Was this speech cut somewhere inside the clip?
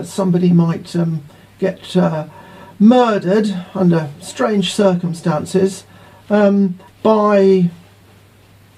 yes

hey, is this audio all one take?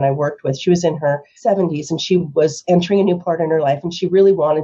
no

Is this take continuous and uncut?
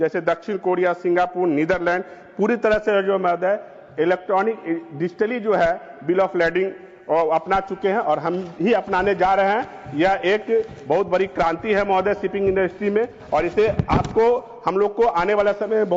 yes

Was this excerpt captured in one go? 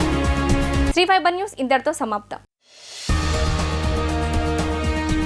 yes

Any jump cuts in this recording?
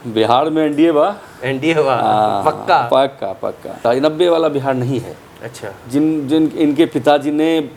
no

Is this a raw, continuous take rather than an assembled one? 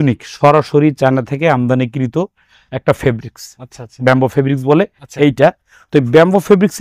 yes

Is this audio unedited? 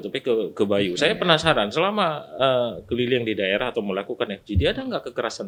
yes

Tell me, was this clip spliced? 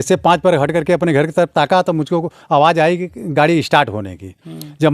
no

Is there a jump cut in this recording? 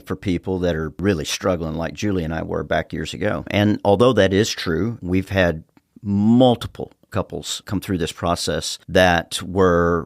yes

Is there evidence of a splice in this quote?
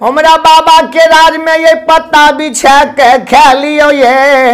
no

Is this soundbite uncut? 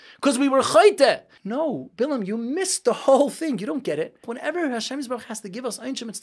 no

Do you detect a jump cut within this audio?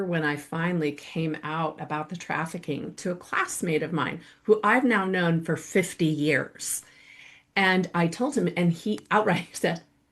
no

